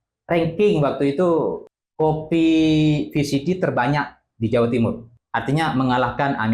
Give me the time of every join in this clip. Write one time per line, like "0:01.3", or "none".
0:01.6
0:05.1